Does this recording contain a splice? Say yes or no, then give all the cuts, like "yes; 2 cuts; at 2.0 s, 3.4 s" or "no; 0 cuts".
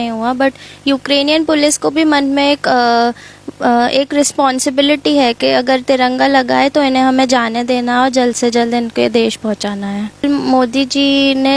yes; 1 cut; at 10.2 s